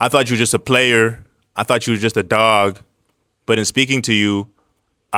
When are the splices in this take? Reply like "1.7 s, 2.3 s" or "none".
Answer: none